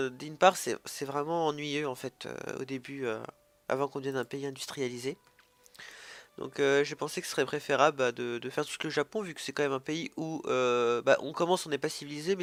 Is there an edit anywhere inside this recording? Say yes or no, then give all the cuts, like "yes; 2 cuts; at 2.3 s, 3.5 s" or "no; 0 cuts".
no; 0 cuts